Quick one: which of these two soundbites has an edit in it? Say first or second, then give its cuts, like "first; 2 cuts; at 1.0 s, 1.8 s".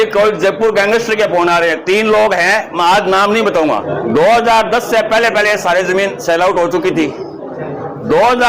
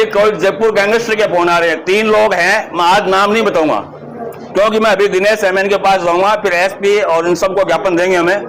first; 1 cut; at 3.9 s